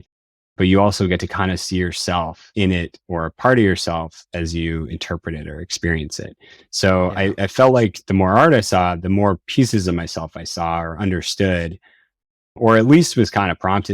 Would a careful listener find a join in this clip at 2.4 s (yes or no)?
yes